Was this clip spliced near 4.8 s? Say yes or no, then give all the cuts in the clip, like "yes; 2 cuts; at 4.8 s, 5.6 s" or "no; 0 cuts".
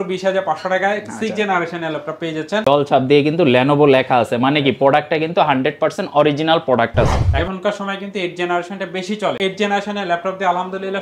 no; 3 cuts; at 2.6 s, 7.3 s, 9.4 s